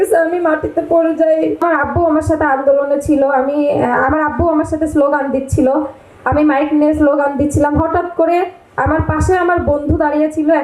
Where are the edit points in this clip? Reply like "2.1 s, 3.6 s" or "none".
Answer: 1.6 s